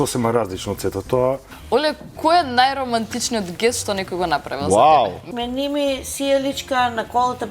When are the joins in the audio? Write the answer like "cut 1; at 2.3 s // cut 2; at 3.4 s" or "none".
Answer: cut 1; at 1.5 s // cut 2; at 5.2 s